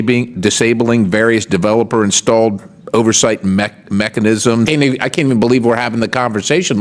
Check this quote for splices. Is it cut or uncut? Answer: cut